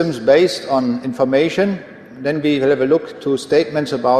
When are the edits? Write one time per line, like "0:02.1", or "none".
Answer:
0:03.1